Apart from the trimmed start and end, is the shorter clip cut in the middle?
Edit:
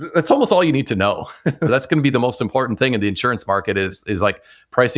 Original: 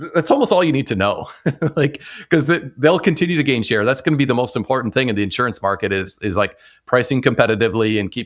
yes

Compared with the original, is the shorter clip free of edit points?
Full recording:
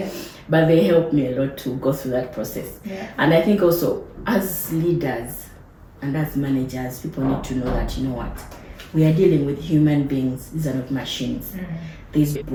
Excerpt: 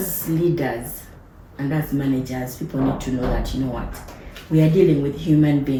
yes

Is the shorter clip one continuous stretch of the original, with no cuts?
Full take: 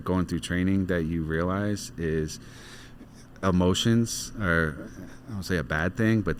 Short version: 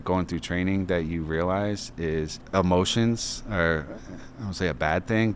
no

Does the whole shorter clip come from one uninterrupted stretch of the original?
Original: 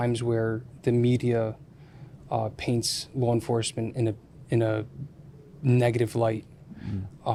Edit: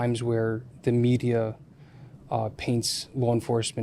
yes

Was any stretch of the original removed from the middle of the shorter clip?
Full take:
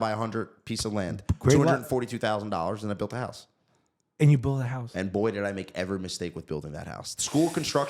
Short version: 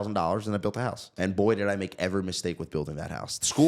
yes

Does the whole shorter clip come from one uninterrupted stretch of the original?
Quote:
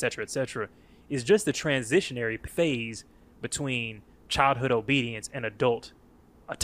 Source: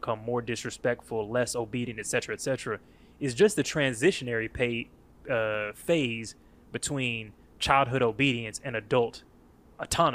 no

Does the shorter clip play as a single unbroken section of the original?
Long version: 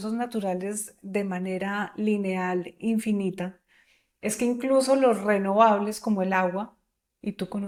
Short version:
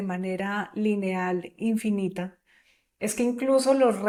yes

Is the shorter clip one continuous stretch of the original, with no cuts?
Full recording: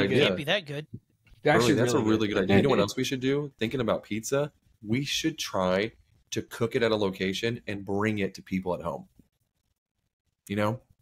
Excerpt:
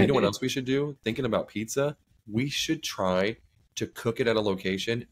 yes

